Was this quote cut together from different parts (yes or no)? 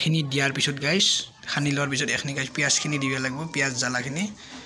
no